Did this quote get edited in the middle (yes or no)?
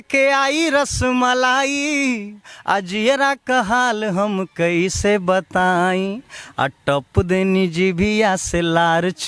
no